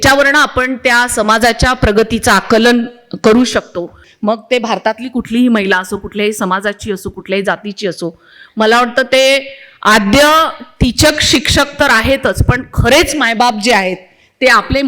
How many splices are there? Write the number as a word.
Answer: one